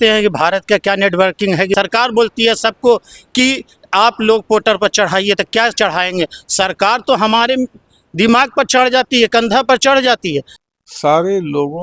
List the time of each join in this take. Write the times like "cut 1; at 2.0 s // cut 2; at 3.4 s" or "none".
cut 1; at 1.7 s // cut 2; at 10.6 s